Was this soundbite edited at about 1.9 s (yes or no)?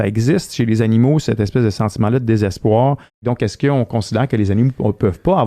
no